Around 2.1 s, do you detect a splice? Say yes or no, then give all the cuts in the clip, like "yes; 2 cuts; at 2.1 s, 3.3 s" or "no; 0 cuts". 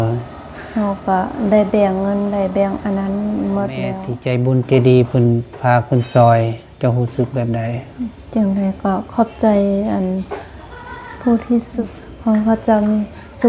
no; 2 cuts; at 4.1 s, 11.7 s